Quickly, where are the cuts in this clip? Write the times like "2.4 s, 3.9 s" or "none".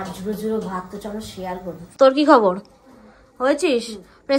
1.9 s

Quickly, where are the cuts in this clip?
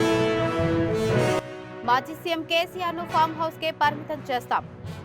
1.5 s

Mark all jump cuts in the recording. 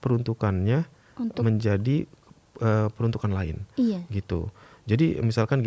none

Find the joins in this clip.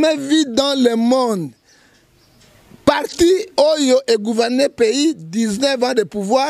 none

